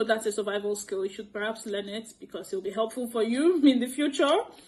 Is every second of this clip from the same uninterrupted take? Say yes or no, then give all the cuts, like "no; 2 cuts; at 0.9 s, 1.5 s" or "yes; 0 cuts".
yes; 0 cuts